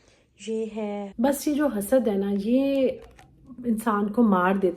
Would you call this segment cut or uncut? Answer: cut